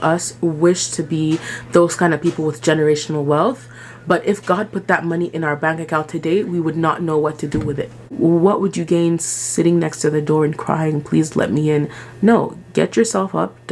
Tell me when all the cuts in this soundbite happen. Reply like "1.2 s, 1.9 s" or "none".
8.1 s